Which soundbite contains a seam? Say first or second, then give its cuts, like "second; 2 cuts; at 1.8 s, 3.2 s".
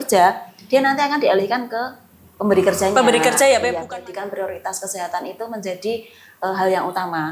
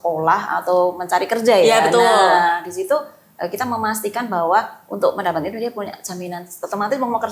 first; 1 cut; at 3.7 s